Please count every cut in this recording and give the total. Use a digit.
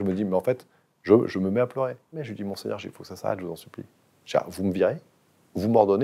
1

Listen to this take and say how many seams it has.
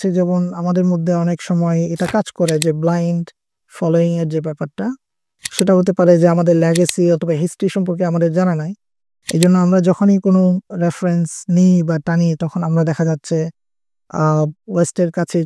0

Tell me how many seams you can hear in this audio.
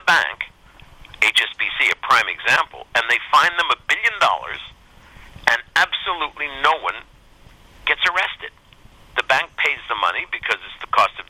0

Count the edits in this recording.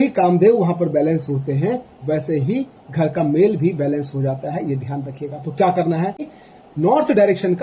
1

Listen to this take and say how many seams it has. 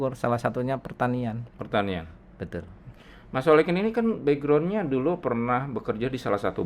0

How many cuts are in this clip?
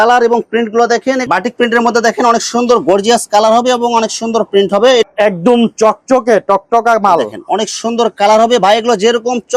2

